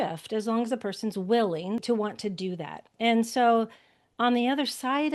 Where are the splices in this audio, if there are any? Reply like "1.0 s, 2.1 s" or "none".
1.8 s, 2.9 s